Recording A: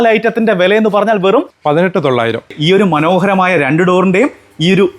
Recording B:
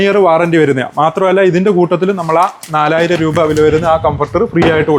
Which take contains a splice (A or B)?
A